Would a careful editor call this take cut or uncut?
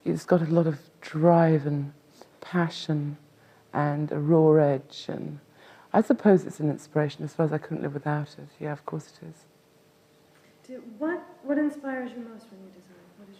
uncut